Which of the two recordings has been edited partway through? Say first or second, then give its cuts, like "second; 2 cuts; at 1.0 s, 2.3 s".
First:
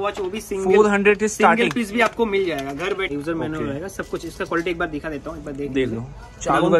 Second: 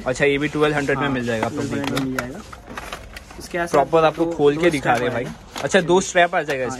first; 1 cut; at 3.1 s